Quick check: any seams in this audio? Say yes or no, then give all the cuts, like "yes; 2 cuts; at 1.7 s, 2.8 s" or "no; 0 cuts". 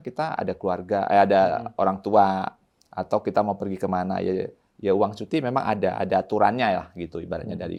no; 0 cuts